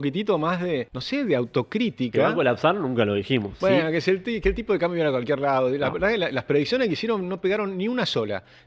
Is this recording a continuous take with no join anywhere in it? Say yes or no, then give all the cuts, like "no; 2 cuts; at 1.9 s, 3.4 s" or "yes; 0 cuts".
no; 2 cuts; at 1.0 s, 3.5 s